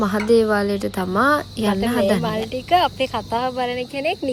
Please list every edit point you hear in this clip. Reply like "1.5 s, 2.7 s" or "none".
none